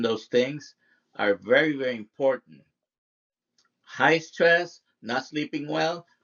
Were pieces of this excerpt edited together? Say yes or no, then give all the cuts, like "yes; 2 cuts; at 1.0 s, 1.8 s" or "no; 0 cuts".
no; 0 cuts